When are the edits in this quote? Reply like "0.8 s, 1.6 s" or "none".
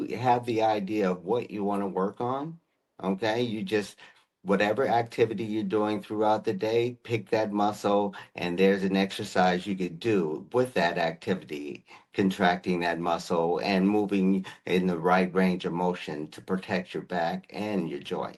none